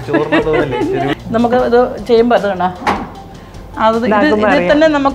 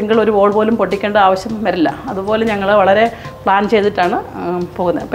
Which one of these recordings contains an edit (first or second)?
first